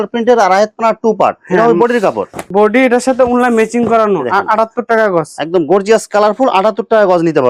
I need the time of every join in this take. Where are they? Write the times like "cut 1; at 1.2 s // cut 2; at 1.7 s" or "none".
none